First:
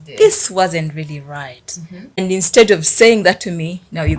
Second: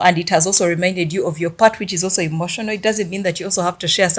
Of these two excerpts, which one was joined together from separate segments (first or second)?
first